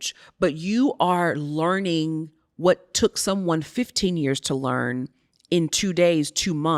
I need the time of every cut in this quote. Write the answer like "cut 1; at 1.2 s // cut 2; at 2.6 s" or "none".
none